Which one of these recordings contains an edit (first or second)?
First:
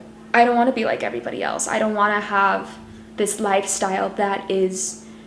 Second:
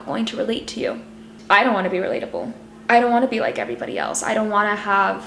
second